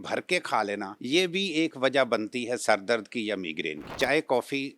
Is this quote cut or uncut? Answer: cut